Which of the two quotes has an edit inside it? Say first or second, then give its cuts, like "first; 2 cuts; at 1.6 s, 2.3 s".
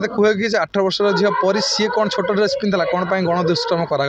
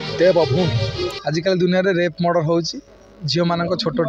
second; 1 cut; at 1.2 s